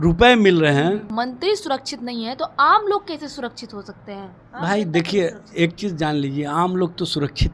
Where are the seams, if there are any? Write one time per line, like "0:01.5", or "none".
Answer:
0:01.1